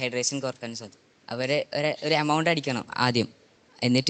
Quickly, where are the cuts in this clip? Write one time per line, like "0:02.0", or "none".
none